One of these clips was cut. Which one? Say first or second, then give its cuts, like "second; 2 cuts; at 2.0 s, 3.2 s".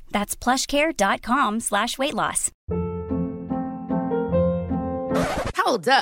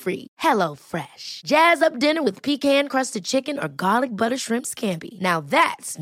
first; 1 cut; at 2.5 s